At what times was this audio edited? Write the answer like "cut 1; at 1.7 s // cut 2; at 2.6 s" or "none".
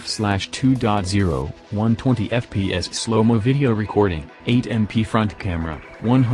cut 1; at 1.6 s // cut 2; at 2.9 s // cut 3; at 4.3 s // cut 4; at 5.4 s